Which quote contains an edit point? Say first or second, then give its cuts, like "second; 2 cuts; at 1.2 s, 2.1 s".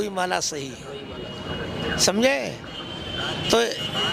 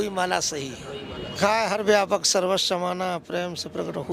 second; 1 cut; at 1.4 s